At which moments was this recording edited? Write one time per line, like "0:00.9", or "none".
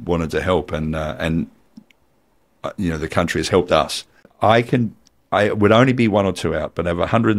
0:04.3